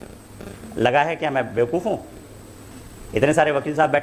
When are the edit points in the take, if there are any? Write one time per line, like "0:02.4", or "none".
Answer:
none